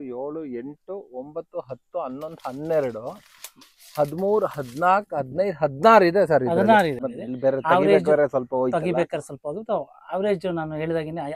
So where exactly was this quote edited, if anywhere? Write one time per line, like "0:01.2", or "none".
0:07.0